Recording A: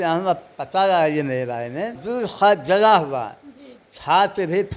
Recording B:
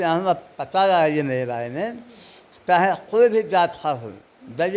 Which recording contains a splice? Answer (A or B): A